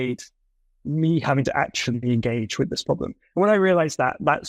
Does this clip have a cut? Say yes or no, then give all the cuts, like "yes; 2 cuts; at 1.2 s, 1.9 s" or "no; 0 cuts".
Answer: no; 0 cuts